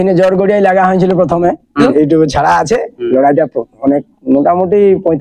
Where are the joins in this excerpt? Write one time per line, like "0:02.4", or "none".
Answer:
0:01.8